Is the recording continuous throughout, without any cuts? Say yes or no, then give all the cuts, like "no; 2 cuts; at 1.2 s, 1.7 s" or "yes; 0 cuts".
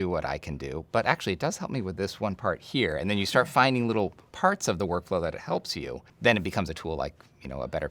no; 1 cut; at 6.0 s